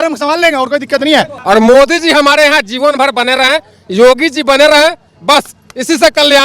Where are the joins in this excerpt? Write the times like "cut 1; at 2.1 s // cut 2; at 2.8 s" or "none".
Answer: cut 1; at 1.3 s